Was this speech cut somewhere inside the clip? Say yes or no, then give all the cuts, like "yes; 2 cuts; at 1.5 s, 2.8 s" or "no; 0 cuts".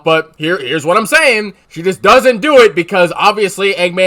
no; 0 cuts